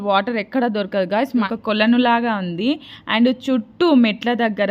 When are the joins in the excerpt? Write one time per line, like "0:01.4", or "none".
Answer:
0:01.5